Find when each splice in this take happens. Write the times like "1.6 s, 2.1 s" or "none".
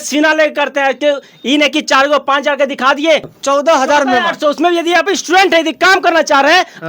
3.3 s